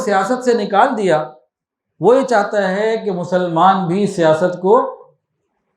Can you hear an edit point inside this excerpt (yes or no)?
no